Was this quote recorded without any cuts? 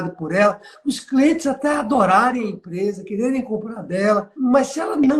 no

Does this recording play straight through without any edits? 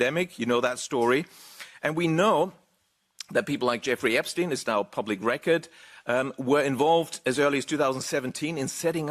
yes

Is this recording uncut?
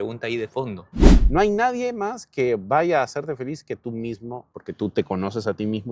no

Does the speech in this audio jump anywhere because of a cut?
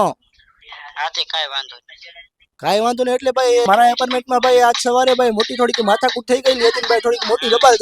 yes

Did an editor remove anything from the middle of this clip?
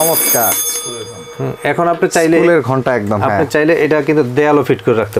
no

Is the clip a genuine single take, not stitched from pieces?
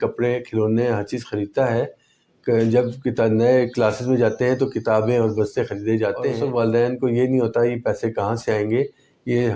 no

